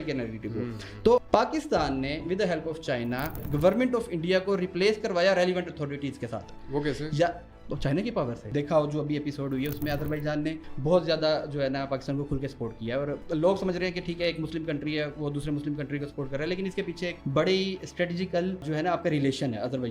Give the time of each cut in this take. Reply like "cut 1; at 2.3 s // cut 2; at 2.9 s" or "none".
cut 1; at 1.2 s // cut 2; at 3.5 s // cut 3; at 8.4 s // cut 4; at 10.7 s // cut 5; at 13.2 s // cut 6; at 17.2 s // cut 7; at 18.7 s